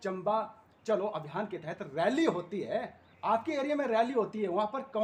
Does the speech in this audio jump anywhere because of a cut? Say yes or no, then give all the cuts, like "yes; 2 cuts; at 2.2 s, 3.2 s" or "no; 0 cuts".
no; 0 cuts